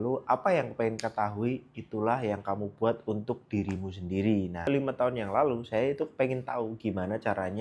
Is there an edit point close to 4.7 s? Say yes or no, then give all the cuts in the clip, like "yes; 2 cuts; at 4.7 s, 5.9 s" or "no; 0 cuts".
yes; 1 cut; at 4.7 s